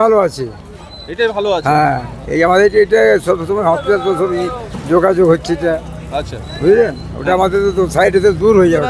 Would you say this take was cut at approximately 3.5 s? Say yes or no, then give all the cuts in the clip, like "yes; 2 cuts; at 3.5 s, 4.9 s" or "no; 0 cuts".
no; 0 cuts